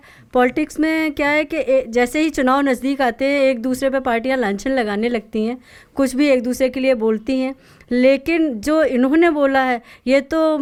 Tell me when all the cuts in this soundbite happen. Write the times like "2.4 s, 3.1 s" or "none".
none